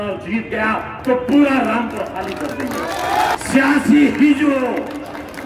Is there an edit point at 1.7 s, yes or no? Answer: no